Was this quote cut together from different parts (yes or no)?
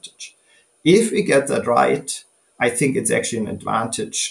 no